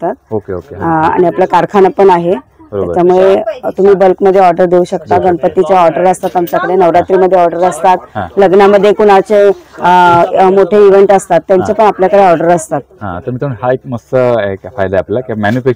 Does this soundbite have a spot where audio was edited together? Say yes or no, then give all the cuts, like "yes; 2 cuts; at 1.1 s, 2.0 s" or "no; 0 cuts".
no; 0 cuts